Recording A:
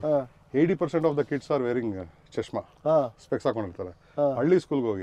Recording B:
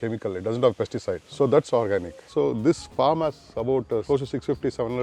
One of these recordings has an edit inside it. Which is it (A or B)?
B